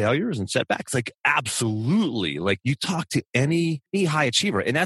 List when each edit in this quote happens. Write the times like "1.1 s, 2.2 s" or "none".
1.1 s, 2.6 s, 3.9 s